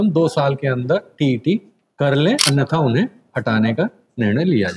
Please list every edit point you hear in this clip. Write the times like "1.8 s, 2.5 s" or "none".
2.4 s